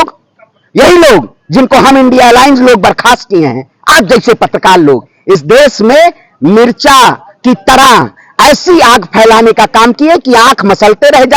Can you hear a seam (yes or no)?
no